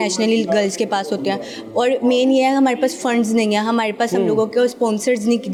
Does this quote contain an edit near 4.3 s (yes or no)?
no